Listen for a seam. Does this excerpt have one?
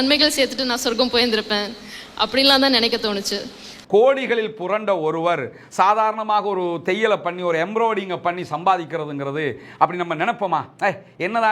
yes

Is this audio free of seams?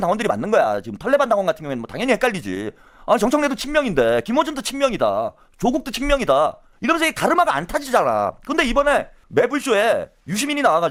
yes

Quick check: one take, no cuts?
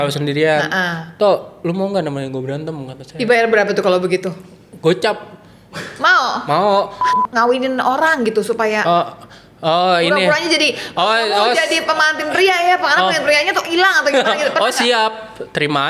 no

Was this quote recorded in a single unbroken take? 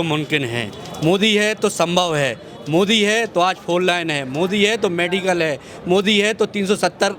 yes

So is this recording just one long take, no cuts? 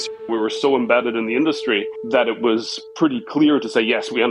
yes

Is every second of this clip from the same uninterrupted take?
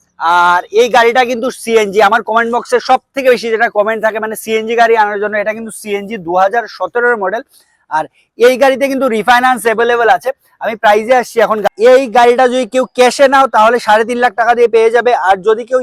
yes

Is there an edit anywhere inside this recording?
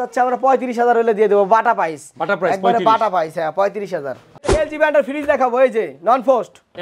yes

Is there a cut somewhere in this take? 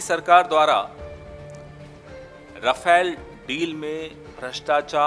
yes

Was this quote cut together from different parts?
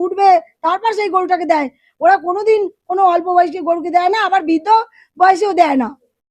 no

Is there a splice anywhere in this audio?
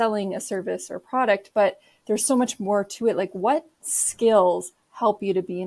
no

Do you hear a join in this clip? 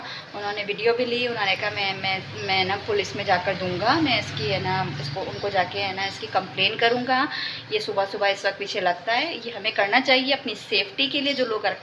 no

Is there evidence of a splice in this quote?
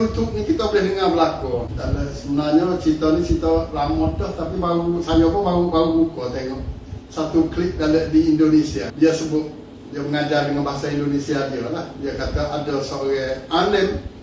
yes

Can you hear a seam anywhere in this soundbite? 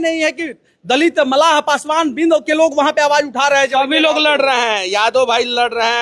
no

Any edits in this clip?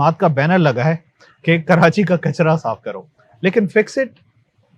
no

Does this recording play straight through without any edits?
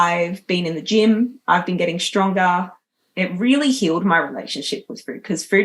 no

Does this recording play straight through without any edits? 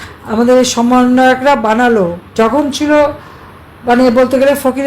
no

